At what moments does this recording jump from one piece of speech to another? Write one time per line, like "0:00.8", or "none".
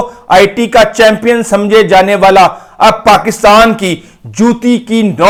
none